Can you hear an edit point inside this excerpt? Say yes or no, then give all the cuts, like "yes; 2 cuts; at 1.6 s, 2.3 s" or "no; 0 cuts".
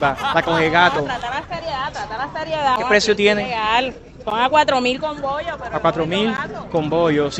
yes; 1 cut; at 2.8 s